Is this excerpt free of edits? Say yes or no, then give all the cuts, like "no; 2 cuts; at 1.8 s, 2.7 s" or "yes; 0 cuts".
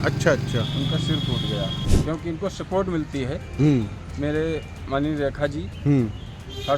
no; 1 cut; at 1.8 s